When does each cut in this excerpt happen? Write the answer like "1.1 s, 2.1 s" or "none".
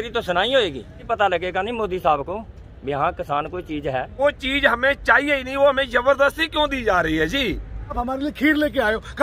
1.0 s, 4.2 s, 8.0 s